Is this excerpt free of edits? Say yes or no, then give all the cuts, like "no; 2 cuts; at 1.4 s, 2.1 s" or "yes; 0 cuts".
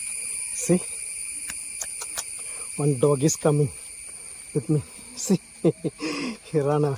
yes; 0 cuts